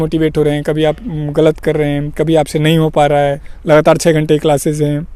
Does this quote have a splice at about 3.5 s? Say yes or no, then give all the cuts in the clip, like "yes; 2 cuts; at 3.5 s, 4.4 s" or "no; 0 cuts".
yes; 1 cut; at 3.5 s